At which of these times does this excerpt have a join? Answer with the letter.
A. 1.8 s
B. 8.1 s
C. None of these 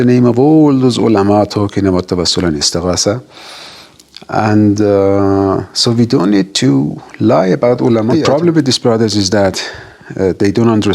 B